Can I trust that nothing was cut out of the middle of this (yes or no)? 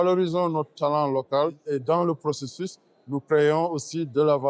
no